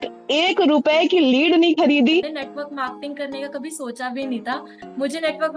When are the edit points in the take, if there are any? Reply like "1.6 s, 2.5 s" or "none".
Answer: 2.4 s